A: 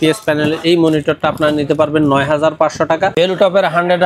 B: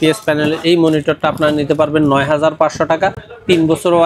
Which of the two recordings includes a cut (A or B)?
A